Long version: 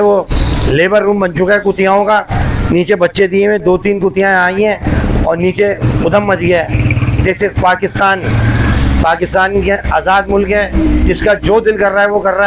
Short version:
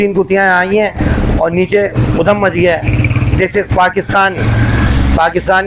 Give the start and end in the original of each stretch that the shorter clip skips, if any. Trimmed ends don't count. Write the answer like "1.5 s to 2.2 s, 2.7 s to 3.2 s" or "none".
none